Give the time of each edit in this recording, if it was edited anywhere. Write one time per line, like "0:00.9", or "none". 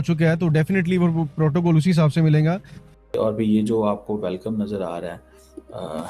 0:03.1